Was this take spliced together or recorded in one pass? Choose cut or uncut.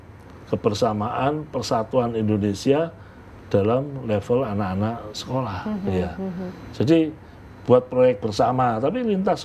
uncut